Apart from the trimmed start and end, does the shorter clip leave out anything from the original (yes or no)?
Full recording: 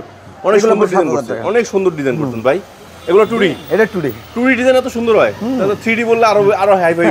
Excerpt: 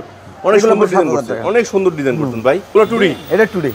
yes